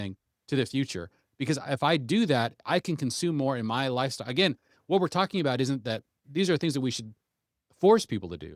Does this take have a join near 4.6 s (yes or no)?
no